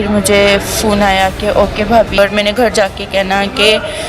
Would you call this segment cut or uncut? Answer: cut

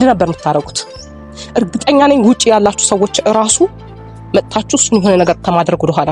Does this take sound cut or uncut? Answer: uncut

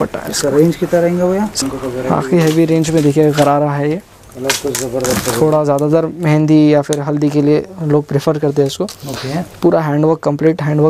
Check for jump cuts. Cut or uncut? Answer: cut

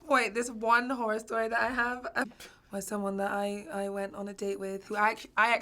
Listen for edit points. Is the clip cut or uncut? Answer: uncut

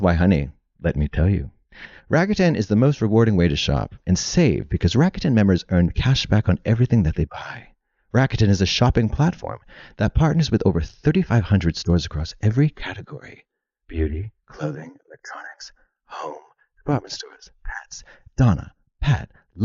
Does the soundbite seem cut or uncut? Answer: uncut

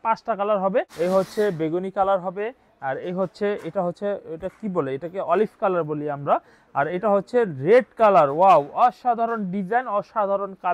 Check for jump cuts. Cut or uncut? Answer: cut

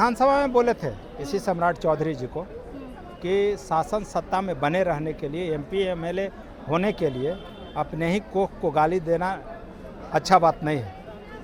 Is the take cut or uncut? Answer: uncut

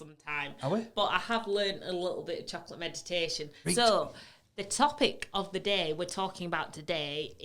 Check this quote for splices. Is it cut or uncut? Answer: cut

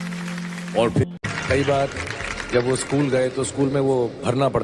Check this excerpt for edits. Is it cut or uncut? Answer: cut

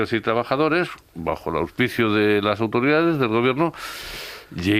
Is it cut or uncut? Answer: uncut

